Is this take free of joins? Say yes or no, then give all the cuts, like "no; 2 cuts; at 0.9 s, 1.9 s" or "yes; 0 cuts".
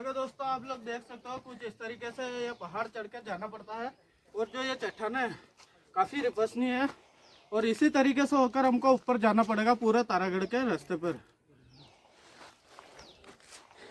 yes; 0 cuts